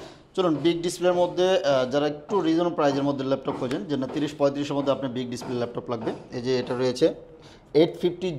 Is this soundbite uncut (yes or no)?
yes